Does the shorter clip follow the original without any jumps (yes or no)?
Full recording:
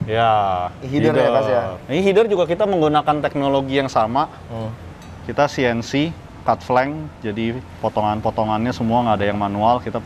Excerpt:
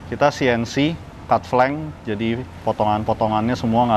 yes